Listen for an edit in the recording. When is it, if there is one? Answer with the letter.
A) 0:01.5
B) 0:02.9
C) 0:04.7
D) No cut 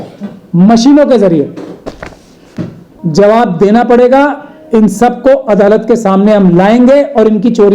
B